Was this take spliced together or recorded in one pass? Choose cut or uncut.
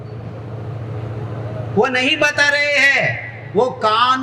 uncut